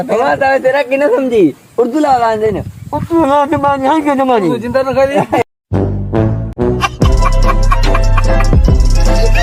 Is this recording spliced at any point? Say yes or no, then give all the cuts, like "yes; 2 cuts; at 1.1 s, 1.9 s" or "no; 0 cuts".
no; 0 cuts